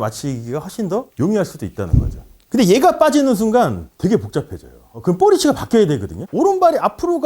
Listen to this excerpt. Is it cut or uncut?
cut